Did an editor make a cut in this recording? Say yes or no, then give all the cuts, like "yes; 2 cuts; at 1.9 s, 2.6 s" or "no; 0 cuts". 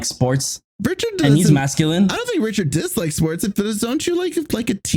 no; 0 cuts